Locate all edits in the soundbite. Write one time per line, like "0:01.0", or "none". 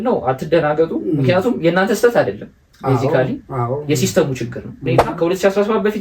0:05.1